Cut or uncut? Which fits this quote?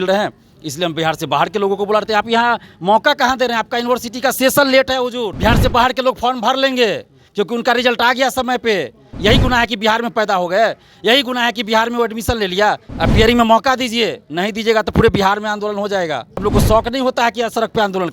cut